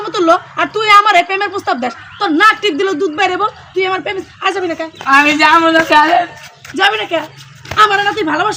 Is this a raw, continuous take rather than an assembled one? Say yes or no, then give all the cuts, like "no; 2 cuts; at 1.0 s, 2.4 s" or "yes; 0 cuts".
yes; 0 cuts